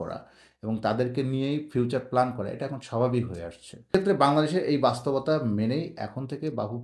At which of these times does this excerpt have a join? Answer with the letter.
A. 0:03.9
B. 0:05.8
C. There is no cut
A